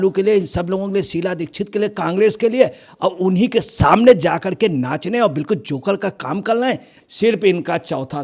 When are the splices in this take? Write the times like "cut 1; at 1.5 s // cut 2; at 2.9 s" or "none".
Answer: cut 1; at 6.9 s